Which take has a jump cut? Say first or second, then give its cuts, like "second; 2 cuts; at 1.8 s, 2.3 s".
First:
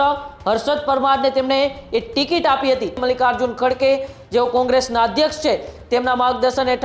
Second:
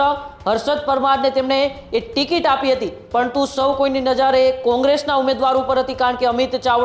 first; 1 cut; at 3.0 s